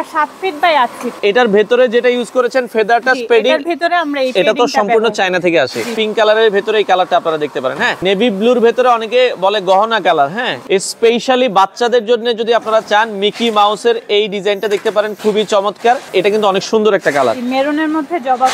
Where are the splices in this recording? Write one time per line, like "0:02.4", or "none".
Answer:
0:01.2
0:06.0
0:08.0
0:10.5
0:16.1